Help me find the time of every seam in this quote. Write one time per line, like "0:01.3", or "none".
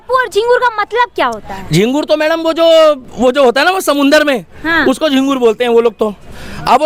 none